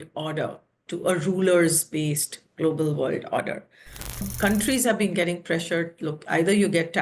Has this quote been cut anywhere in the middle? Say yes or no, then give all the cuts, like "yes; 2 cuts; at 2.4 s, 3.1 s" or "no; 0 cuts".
yes; 1 cut; at 4.3 s